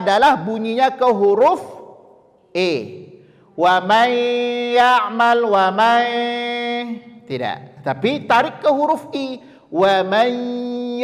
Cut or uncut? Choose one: uncut